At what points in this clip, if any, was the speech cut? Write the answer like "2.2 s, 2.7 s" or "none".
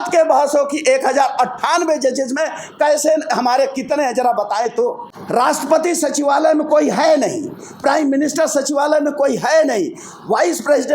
5.1 s